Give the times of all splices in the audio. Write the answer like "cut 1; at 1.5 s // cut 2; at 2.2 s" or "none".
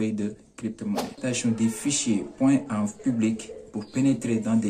cut 1; at 1.2 s